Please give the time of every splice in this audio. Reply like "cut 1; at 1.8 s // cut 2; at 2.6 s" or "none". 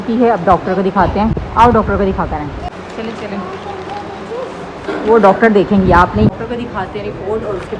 none